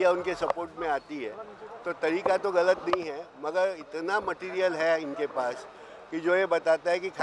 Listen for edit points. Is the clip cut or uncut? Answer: uncut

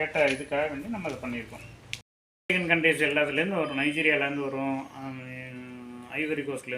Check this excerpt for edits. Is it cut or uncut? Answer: cut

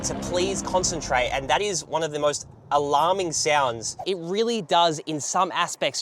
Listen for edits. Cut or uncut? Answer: cut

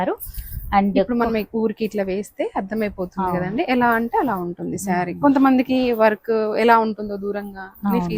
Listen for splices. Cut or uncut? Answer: uncut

